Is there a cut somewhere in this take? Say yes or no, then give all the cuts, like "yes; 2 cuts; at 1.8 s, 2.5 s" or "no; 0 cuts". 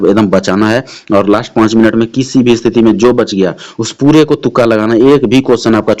no; 0 cuts